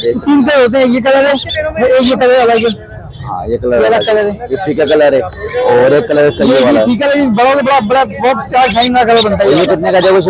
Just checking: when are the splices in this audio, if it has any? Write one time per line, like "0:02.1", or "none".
none